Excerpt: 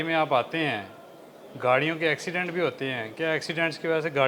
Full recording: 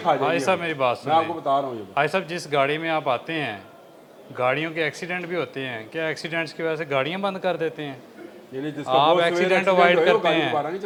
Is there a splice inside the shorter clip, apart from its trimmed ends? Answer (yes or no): no